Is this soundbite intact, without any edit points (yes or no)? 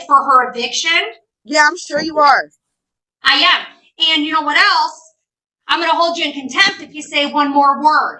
yes